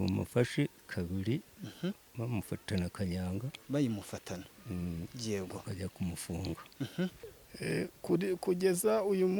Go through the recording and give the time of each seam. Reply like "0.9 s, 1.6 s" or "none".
7.3 s